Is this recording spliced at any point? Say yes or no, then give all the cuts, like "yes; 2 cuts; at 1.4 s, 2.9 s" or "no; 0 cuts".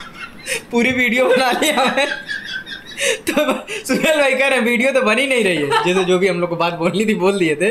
no; 0 cuts